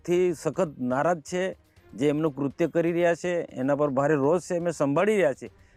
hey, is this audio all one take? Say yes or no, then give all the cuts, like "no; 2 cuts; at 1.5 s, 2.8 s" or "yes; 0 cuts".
yes; 0 cuts